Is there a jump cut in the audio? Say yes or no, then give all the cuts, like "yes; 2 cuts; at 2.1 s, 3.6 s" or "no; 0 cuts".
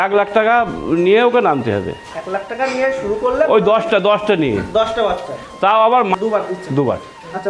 yes; 1 cut; at 6.2 s